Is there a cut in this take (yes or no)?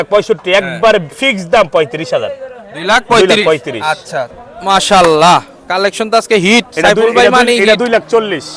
yes